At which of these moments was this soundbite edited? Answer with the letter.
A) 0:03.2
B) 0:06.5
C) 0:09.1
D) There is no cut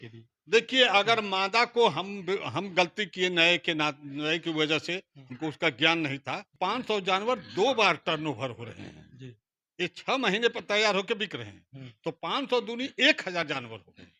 B